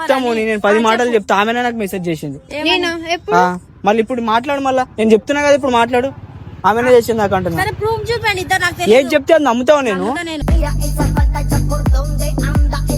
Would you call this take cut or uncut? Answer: uncut